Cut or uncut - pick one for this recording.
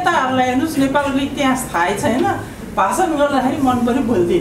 uncut